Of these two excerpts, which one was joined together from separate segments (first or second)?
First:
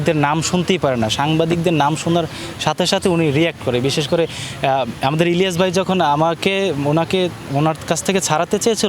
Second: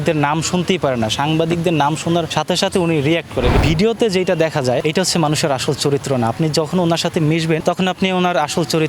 second